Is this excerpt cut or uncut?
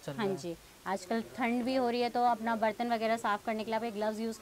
uncut